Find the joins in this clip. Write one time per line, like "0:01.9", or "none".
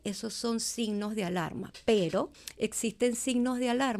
0:01.6
0:02.4